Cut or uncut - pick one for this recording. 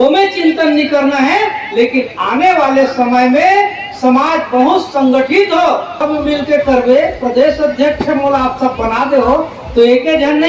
cut